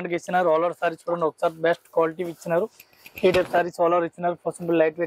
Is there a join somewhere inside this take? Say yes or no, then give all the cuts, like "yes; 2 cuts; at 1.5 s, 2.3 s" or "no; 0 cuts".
no; 0 cuts